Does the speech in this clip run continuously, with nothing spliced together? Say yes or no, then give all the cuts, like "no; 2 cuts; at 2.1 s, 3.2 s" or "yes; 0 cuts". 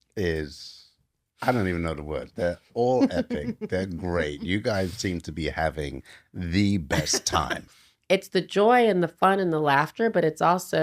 no; 1 cut; at 7.8 s